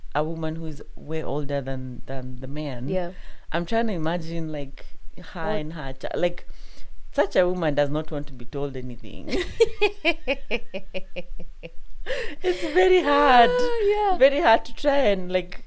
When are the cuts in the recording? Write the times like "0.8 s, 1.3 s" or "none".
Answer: none